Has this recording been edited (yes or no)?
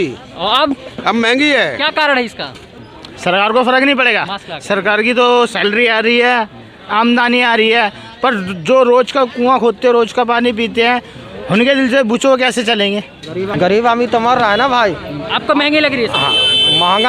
yes